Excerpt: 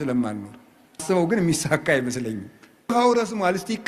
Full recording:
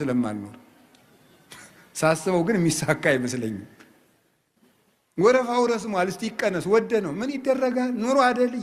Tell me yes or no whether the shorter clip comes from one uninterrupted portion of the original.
no